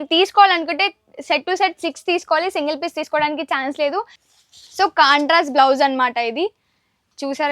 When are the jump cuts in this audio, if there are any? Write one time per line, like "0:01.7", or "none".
0:04.2